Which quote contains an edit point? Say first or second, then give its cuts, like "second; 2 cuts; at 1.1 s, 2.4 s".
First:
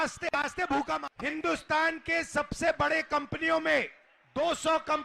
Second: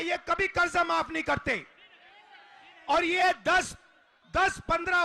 first; 1 cut; at 1.1 s